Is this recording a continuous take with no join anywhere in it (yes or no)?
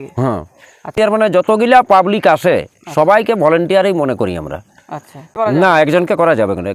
no